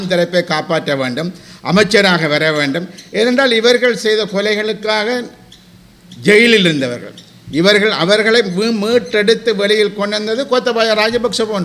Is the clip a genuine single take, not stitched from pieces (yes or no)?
yes